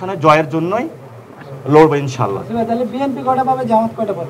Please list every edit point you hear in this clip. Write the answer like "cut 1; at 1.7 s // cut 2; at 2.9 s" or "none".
none